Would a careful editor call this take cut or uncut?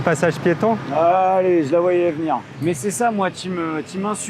uncut